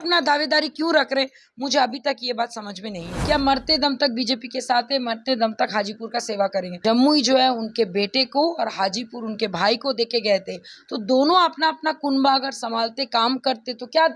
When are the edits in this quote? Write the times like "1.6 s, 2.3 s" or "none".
3.1 s, 6.7 s